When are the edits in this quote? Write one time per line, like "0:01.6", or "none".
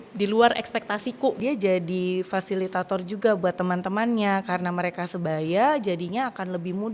0:01.4